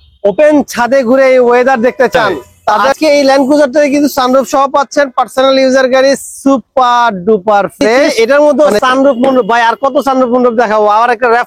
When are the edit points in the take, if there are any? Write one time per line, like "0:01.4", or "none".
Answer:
0:02.9
0:08.1